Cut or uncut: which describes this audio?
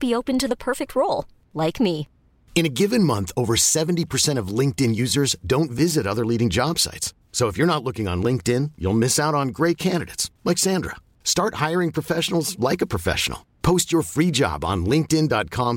uncut